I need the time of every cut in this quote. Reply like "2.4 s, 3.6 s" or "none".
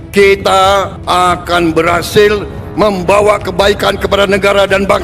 1.0 s